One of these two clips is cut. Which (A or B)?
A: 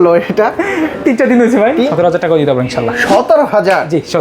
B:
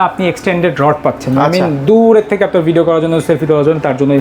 A